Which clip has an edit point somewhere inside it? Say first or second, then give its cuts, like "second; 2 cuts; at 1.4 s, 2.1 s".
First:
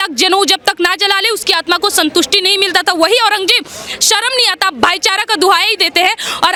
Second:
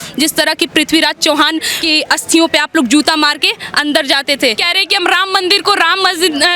second; 2 cuts; at 1.7 s, 4.7 s